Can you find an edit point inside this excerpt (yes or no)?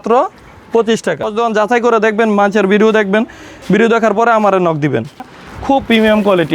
yes